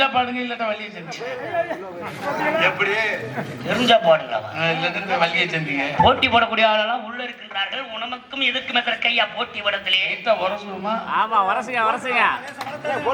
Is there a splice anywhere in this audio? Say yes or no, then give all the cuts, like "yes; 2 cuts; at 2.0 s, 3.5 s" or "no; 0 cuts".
yes; 1 cut; at 5.9 s